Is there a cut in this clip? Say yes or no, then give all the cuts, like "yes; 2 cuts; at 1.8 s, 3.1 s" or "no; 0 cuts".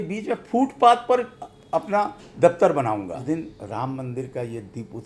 yes; 1 cut; at 3.1 s